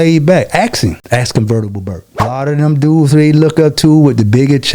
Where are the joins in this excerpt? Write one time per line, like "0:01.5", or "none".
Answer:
0:01.0
0:02.3

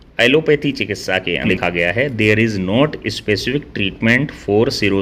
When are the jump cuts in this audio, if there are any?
0:01.4

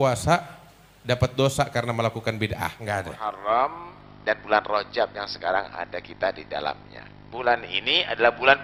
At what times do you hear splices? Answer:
0:03.2

